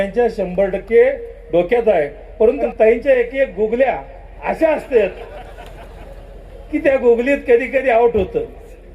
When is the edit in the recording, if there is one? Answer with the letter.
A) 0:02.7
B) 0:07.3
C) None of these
A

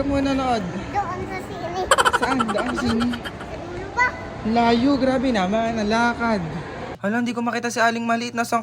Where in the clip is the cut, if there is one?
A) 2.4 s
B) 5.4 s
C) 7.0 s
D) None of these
C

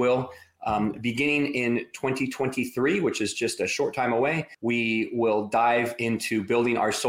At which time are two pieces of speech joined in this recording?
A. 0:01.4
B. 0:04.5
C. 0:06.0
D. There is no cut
B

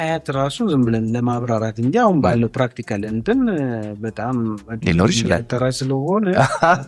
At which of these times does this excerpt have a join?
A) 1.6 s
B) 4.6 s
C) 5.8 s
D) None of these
D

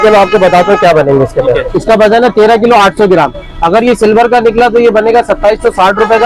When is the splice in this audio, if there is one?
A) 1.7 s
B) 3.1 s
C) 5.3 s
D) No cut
A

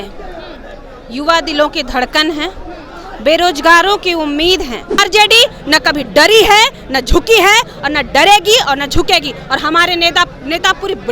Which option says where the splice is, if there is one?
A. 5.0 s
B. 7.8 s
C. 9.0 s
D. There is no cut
A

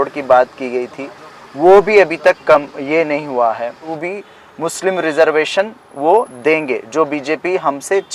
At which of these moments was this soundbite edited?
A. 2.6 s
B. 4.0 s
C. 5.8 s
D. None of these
B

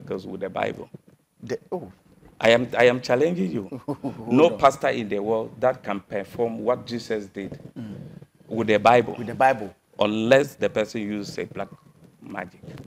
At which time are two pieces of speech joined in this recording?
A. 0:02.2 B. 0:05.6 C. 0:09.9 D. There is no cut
D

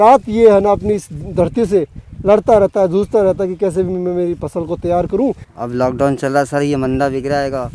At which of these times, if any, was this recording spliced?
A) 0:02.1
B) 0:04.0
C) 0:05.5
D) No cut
C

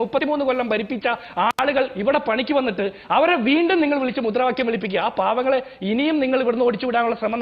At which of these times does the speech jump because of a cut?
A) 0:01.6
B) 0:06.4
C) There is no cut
A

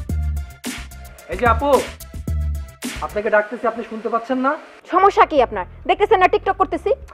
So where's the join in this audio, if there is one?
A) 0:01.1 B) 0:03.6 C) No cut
A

